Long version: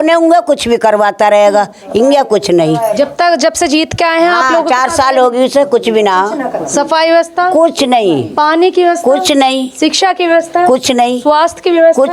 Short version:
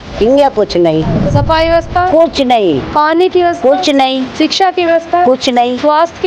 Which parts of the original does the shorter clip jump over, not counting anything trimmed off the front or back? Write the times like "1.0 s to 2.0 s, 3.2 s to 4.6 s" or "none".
3.0 s to 6.6 s